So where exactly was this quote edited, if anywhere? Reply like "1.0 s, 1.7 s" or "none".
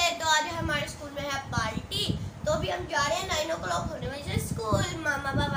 4.1 s